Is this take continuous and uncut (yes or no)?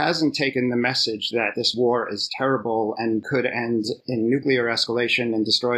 yes